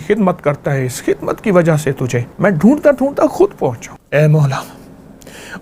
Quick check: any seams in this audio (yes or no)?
yes